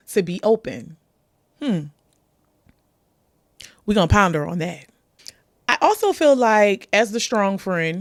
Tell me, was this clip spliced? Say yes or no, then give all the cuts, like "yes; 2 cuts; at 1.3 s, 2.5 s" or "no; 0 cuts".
no; 0 cuts